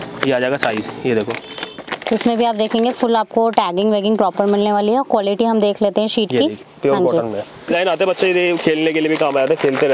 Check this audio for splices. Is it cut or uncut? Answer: cut